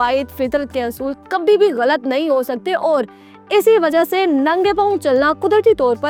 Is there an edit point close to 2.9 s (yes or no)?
no